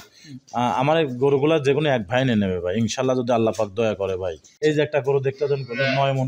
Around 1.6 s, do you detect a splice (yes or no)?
no